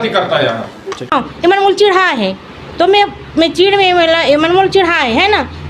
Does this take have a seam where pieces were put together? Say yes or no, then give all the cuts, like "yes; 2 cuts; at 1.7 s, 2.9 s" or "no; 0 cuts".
yes; 1 cut; at 1.1 s